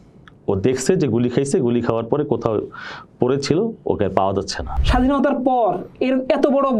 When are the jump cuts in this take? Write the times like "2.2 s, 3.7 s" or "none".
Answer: 4.7 s